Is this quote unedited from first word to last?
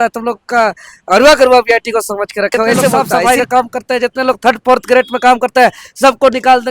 no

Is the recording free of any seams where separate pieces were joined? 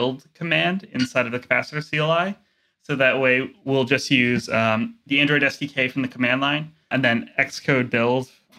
no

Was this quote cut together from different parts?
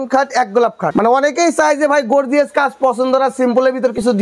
yes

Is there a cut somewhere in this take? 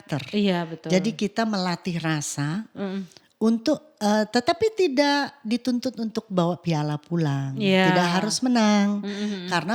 no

